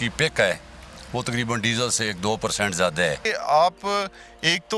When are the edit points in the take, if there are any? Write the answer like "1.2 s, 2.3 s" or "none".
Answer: 3.3 s